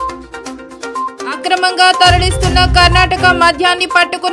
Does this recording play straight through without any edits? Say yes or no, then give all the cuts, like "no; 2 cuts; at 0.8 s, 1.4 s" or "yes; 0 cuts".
no; 1 cut; at 1.1 s